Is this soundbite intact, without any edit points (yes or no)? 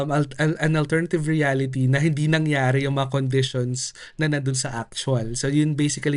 yes